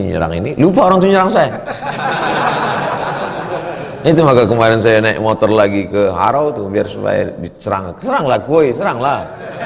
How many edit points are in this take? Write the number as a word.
zero